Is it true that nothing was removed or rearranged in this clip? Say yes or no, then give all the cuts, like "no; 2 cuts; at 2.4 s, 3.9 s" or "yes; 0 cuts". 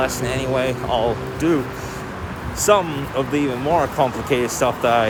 yes; 0 cuts